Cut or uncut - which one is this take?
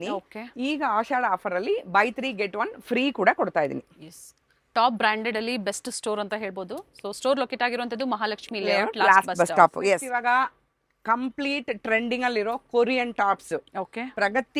uncut